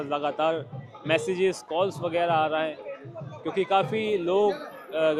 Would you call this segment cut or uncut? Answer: uncut